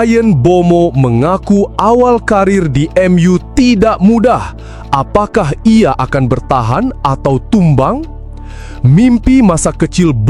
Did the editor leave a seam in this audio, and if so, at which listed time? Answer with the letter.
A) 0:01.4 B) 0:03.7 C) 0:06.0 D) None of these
D